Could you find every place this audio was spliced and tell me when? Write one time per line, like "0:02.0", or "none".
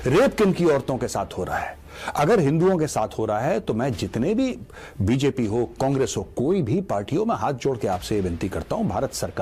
none

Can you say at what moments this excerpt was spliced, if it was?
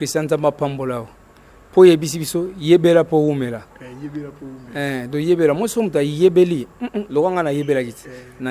none

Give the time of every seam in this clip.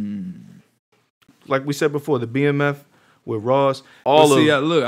0:01.3
0:04.0

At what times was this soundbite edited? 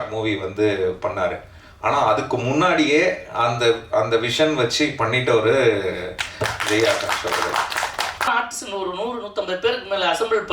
0:08.3

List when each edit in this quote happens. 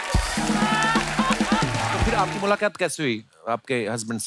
0:02.1

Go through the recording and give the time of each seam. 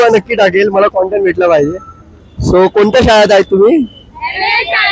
none

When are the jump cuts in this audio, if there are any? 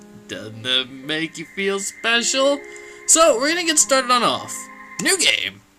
0:01.8

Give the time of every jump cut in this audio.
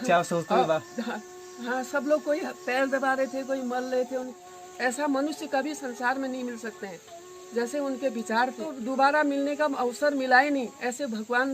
0:04.3
0:08.7

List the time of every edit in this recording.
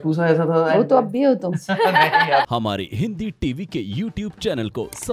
0:02.5

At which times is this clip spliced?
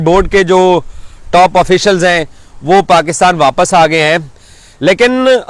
none

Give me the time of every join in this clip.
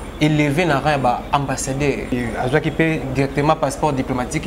0:02.1

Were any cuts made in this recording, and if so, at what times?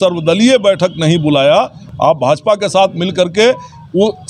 0:01.8

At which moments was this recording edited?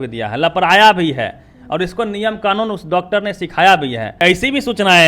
0:04.1

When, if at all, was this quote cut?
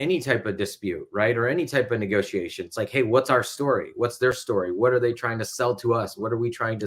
none

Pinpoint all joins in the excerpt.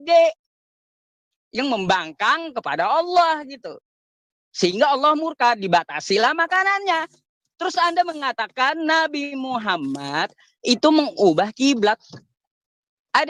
none

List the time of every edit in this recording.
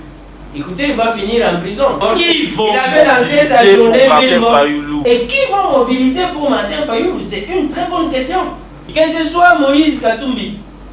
0:02.0
0:04.9
0:08.8

